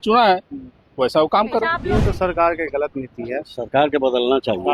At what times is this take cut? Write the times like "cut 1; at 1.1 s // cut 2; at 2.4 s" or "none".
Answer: cut 1; at 1.7 s